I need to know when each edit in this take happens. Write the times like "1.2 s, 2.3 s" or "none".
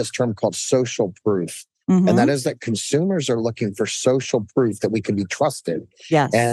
none